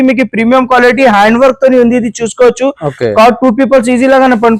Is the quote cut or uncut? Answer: uncut